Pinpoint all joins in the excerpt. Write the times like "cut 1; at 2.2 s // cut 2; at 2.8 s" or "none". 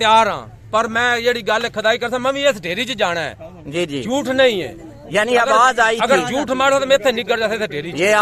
none